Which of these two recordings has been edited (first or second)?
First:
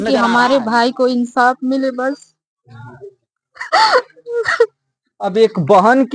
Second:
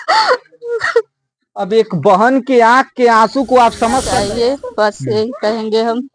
second